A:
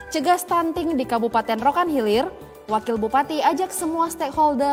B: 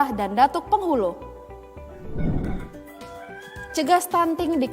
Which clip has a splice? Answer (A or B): B